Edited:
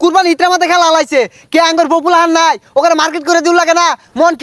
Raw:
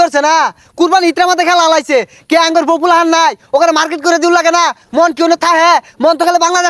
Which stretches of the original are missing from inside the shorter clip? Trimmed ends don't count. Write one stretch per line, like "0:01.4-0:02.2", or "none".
none